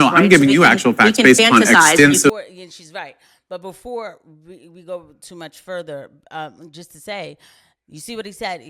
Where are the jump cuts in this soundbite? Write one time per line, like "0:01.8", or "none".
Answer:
0:02.3